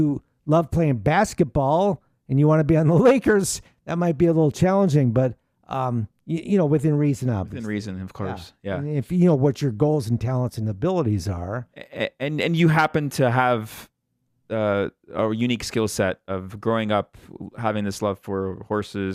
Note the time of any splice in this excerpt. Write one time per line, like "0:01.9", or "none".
none